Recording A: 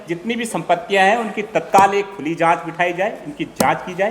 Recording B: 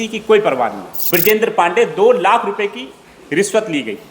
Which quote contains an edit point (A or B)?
B